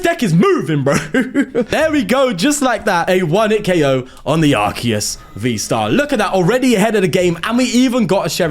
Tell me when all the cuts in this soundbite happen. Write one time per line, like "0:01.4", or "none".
0:01.7
0:03.0